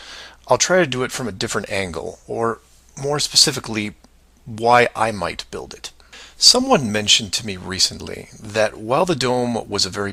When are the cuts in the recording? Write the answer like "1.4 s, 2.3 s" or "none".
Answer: none